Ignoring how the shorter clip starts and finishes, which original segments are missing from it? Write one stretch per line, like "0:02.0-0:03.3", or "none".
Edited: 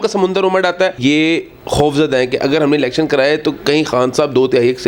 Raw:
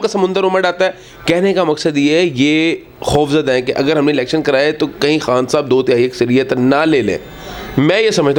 0:01.0-0:02.3